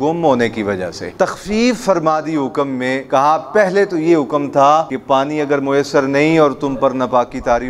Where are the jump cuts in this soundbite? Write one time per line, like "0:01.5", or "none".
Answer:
0:01.1
0:03.0
0:04.9